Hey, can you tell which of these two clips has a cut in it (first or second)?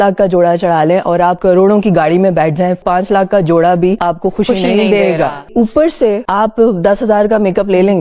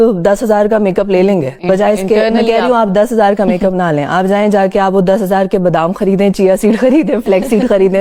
first